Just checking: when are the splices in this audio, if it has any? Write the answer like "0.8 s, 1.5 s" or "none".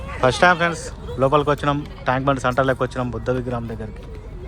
none